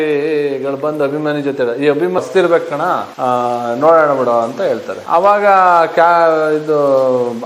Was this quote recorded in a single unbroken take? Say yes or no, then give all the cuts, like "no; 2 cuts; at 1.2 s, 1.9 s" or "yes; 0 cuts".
no; 1 cut; at 2.2 s